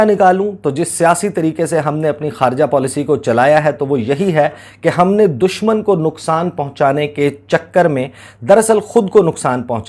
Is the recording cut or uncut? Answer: uncut